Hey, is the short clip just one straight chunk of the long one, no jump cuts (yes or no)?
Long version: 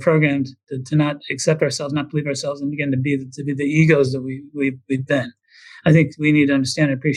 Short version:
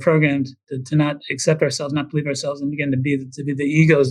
yes